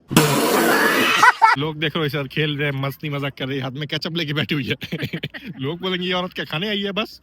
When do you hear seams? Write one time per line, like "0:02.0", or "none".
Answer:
0:01.6